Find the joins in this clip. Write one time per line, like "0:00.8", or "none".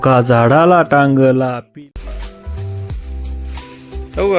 0:01.6